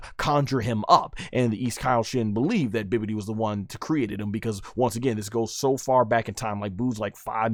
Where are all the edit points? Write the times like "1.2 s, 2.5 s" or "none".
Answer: none